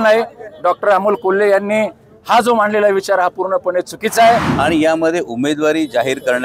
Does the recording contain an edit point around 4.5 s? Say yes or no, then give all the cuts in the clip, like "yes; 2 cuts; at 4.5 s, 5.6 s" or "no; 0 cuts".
yes; 1 cut; at 4.5 s